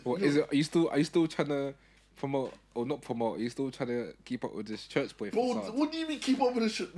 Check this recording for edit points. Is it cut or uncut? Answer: uncut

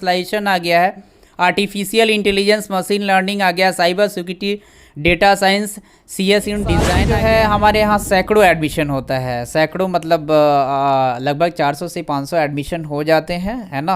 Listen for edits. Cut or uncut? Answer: cut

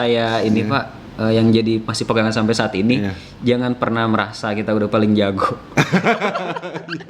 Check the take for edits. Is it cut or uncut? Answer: uncut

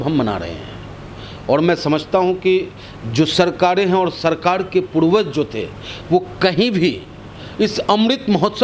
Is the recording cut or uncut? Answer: uncut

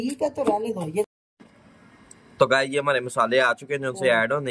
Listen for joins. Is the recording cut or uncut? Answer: cut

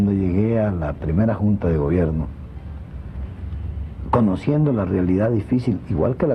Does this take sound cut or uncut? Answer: cut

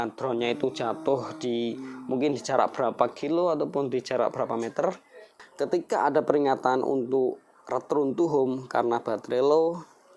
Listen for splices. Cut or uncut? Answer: cut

